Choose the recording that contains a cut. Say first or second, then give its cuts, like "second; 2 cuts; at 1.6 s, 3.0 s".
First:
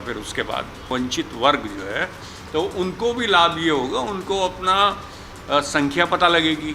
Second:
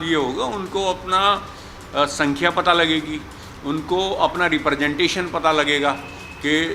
first; 1 cut; at 0.9 s